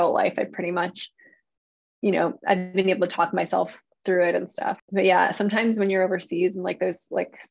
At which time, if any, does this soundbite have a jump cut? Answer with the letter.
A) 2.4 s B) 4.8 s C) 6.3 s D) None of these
B